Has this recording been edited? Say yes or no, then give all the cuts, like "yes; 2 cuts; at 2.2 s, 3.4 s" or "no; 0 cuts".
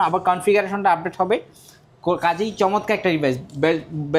no; 0 cuts